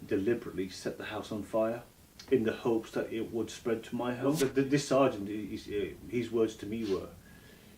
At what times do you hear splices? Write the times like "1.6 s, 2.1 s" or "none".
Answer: 4.4 s